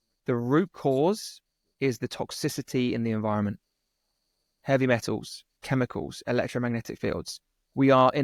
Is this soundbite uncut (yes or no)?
yes